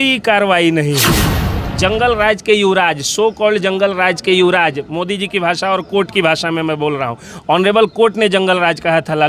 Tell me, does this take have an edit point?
yes; 1 cut; at 1.6 s

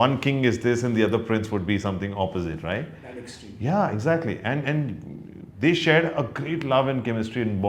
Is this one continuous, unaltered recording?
yes; 0 cuts

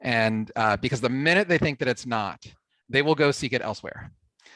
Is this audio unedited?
yes; 0 cuts

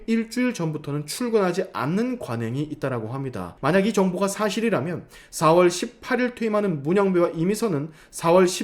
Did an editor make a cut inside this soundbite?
yes; 1 cut; at 3.5 s

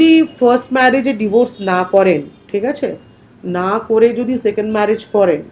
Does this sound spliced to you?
yes; 1 cut; at 2.4 s

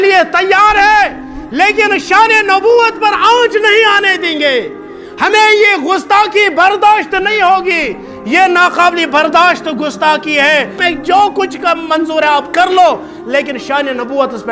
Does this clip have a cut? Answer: yes; 1 cut; at 10.8 s

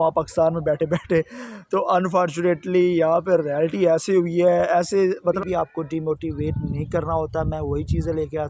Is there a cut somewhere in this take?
yes; 1 cut; at 5.4 s

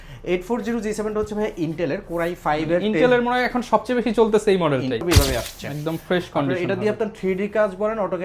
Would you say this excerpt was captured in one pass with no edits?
no; 1 cut; at 5.0 s

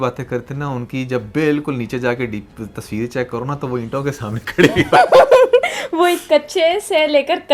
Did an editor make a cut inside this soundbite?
no; 0 cuts

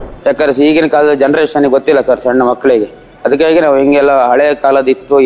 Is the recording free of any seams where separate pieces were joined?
yes; 0 cuts

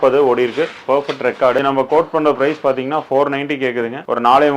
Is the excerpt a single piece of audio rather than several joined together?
yes; 0 cuts

